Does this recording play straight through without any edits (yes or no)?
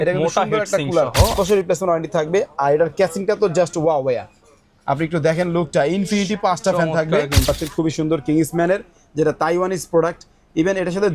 no